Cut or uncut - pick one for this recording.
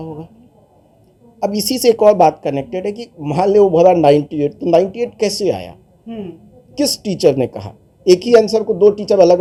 uncut